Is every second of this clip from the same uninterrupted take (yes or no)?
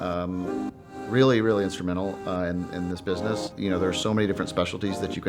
no